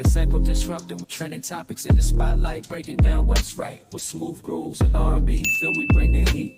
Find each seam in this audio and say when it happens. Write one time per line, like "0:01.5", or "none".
0:01.0